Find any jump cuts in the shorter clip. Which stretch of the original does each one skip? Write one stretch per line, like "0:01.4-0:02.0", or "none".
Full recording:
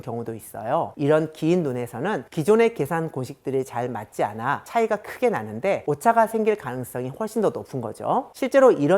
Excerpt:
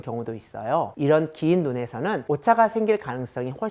0:02.2-0:05.8